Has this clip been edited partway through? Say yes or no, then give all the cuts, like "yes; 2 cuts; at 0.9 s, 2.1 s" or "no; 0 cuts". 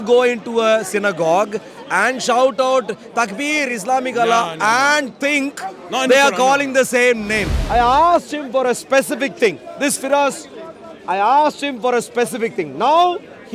yes; 1 cut; at 7.5 s